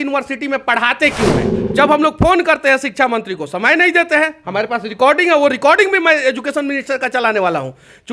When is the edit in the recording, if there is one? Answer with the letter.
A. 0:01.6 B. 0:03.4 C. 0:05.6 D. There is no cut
A